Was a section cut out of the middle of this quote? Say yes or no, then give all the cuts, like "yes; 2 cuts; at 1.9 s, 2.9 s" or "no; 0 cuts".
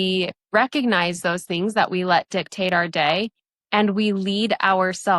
no; 0 cuts